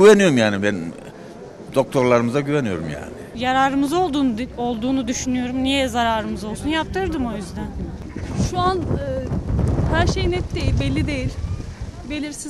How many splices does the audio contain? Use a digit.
2